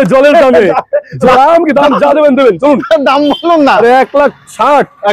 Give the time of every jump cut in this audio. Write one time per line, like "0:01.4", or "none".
0:01.3